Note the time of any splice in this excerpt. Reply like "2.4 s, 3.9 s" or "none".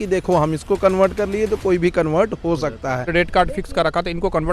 3.1 s